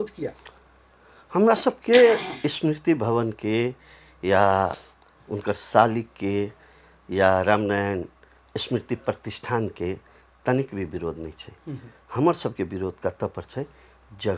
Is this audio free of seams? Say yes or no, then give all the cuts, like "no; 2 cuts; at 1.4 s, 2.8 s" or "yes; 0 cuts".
yes; 0 cuts